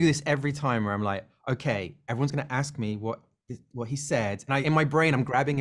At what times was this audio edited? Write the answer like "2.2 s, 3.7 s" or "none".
4.5 s